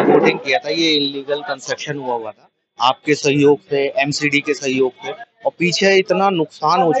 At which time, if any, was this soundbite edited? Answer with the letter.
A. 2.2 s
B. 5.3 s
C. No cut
C